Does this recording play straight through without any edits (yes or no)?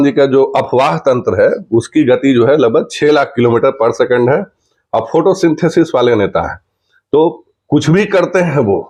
yes